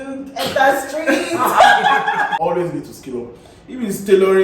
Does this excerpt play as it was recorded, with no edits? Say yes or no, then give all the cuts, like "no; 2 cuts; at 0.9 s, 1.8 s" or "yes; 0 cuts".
no; 1 cut; at 2.4 s